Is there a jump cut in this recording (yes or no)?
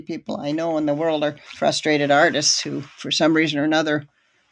yes